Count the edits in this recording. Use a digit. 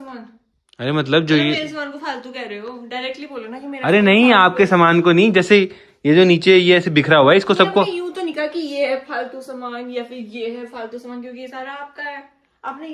0